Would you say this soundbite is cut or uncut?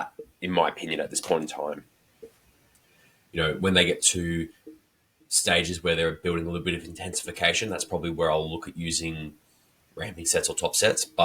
uncut